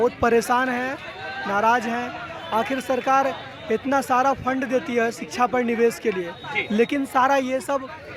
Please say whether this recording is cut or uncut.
uncut